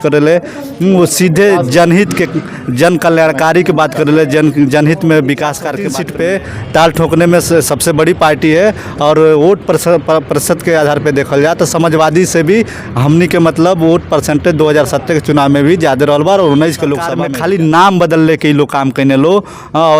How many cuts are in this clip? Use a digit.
2